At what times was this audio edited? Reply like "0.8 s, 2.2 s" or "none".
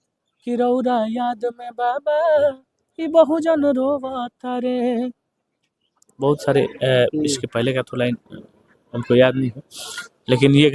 none